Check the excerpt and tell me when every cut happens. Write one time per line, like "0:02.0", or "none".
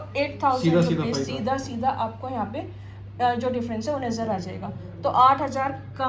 none